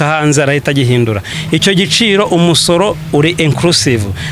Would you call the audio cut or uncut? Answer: cut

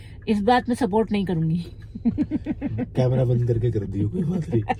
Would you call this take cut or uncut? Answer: uncut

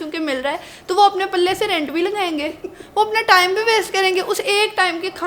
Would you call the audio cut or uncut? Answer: uncut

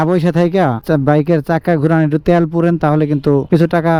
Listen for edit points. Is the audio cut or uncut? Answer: uncut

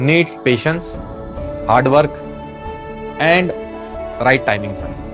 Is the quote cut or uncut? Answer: uncut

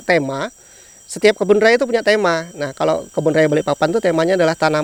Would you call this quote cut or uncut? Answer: uncut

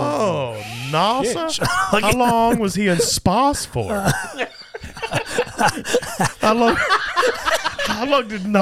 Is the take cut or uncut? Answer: cut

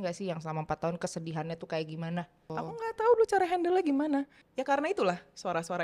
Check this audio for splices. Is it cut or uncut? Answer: cut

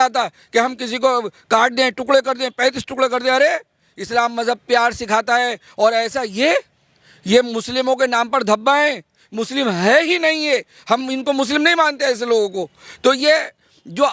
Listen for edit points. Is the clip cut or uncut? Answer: uncut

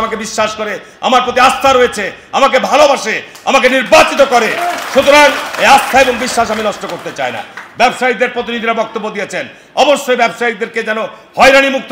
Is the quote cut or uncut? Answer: uncut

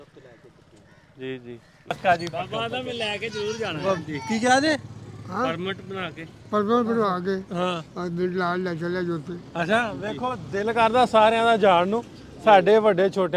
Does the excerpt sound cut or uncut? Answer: cut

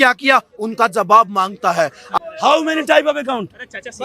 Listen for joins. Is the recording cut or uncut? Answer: cut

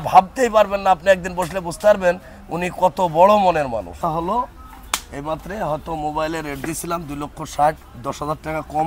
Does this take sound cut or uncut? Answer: cut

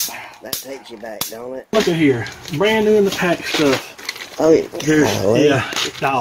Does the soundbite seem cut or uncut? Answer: cut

